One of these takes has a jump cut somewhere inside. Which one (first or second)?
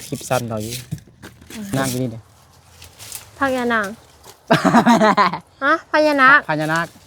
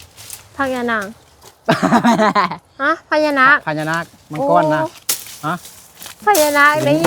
first